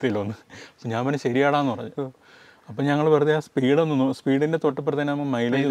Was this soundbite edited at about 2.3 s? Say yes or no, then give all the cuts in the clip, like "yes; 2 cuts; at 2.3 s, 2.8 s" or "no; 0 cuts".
no; 0 cuts